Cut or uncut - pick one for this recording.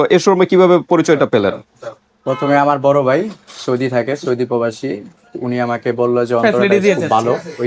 uncut